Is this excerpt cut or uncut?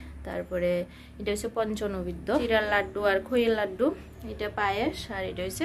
cut